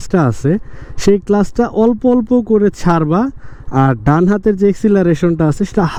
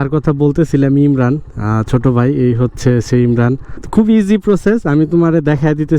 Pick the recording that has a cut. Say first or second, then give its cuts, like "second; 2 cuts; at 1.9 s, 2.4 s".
second; 1 cut; at 3.7 s